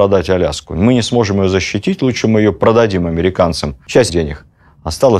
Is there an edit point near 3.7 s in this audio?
yes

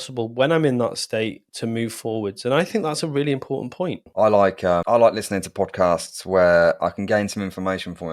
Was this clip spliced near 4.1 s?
yes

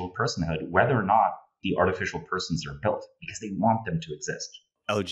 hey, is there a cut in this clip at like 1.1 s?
no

